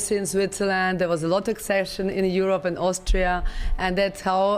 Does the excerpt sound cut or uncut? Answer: uncut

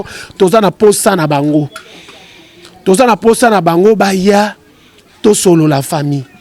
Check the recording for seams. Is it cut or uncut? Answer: uncut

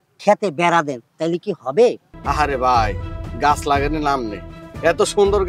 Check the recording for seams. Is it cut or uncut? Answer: cut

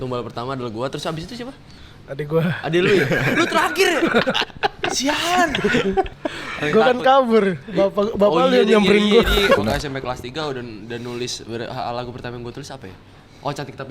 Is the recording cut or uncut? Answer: cut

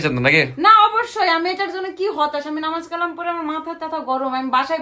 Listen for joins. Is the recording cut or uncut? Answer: uncut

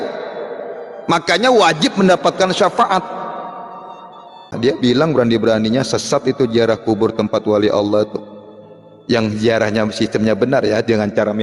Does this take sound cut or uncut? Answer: cut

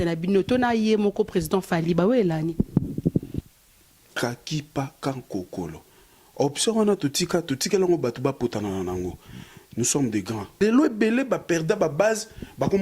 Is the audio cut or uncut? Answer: cut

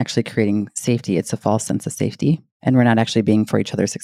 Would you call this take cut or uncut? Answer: cut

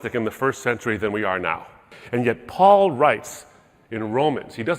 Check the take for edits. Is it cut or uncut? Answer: cut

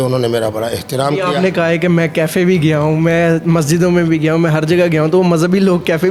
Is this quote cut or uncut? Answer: uncut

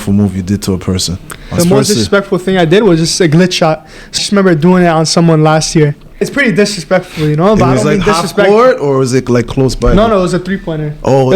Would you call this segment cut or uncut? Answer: cut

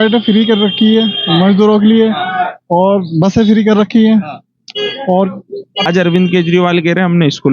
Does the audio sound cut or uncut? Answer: cut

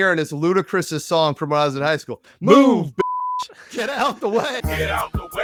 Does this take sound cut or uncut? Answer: uncut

